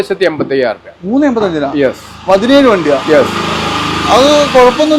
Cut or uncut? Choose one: uncut